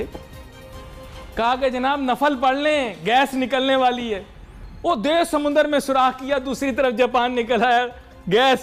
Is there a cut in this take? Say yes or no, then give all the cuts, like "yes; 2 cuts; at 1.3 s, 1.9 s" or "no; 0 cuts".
no; 0 cuts